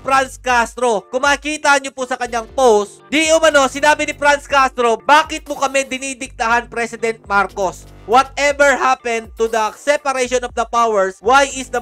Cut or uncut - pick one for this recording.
uncut